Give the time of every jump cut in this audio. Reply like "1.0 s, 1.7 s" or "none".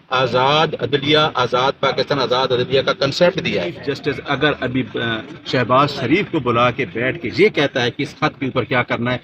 3.9 s